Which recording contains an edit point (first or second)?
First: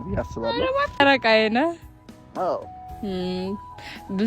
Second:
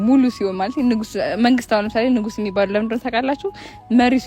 first